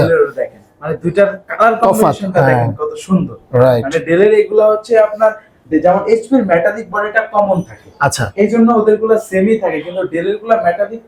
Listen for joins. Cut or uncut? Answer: uncut